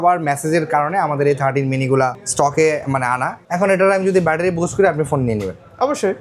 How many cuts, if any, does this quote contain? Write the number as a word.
two